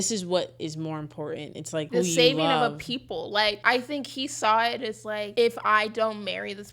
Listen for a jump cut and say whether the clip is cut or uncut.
cut